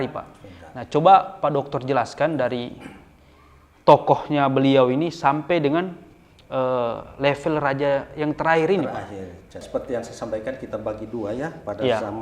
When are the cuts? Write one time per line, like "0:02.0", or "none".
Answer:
0:09.6

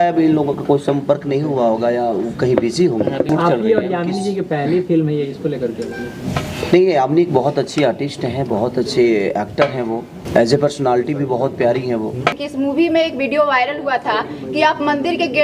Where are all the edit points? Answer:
0:03.3
0:10.1
0:12.4

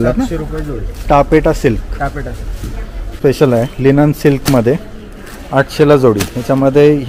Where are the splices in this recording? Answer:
0:03.2

